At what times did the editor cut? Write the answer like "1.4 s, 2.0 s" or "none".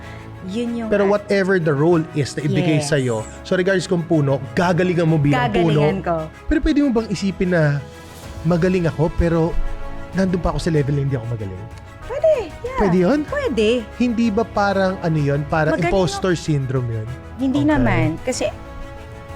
6.3 s, 17.3 s